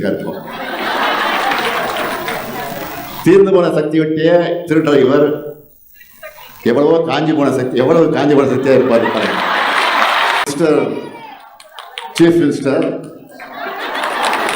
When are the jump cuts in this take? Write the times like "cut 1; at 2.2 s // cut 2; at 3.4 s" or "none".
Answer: cut 1; at 10.5 s